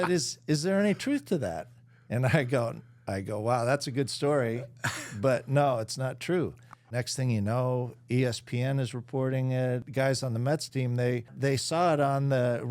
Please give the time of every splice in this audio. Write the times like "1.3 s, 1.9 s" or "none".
7.0 s, 9.9 s, 11.3 s